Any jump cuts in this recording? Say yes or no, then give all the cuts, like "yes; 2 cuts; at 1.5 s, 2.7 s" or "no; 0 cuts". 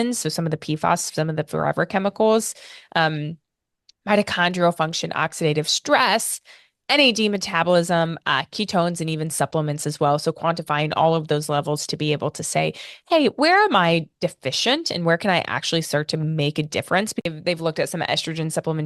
yes; 1 cut; at 17.2 s